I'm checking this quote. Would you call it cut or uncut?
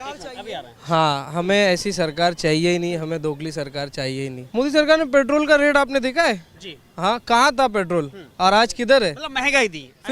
cut